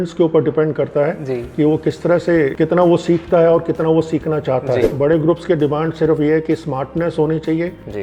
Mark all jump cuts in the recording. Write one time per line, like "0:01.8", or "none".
0:02.5
0:04.9